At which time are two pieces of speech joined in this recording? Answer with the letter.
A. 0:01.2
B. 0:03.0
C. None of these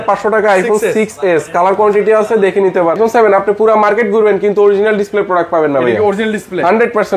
B